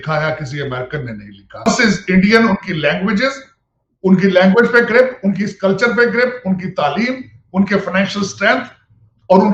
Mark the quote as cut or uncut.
cut